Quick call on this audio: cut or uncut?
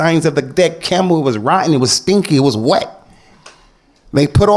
uncut